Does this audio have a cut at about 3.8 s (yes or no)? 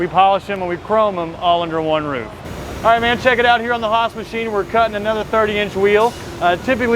no